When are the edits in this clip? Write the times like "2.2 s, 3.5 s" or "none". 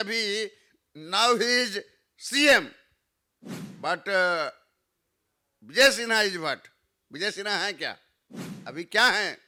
none